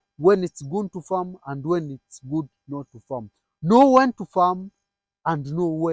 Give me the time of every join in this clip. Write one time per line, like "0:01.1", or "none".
none